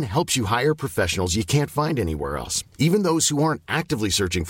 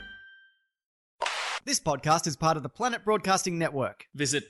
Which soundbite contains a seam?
second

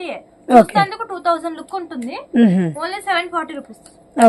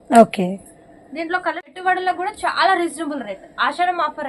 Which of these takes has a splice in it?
second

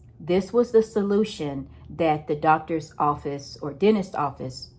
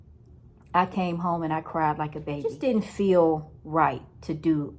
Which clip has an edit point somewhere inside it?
second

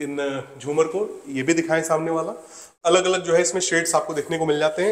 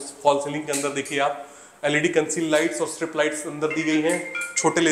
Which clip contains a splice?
first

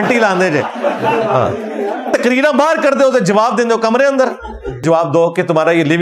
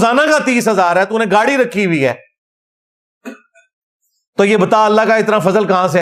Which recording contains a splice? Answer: first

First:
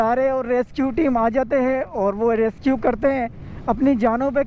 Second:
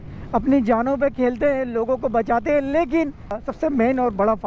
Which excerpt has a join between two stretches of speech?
second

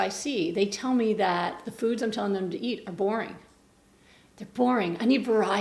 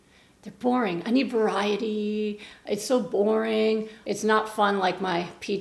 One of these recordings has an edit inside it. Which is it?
second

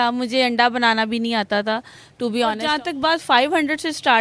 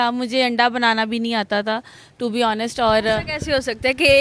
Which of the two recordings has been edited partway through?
first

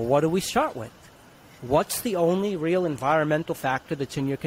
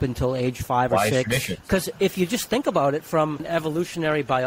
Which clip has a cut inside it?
second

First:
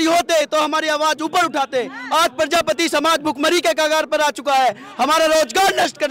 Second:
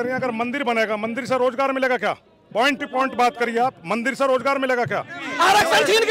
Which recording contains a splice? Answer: second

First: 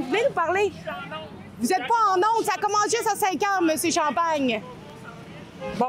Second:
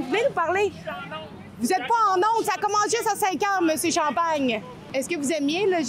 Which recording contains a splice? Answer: second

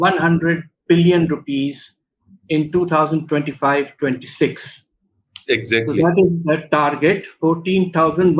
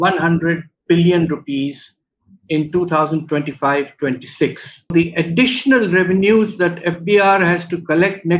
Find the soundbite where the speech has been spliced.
second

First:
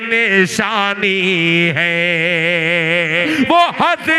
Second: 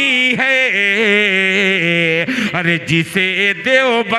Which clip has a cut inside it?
first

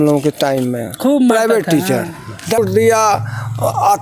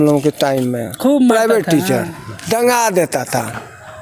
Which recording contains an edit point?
first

